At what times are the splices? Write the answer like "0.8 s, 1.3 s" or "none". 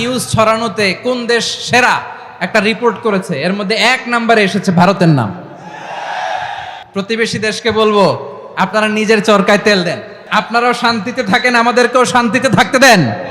6.8 s, 10.1 s